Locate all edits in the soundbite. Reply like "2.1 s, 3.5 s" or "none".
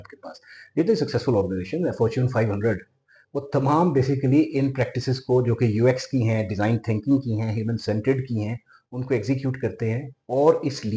none